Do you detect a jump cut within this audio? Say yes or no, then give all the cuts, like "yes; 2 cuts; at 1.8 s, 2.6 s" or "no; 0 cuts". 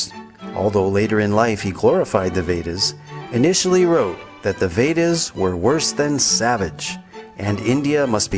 yes; 1 cut; at 3.2 s